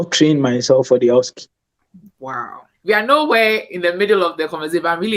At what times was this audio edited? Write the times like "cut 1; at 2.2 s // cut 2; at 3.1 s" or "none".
cut 1; at 2.8 s